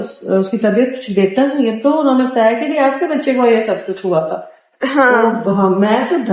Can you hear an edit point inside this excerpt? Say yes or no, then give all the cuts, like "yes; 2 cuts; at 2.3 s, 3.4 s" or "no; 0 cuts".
no; 0 cuts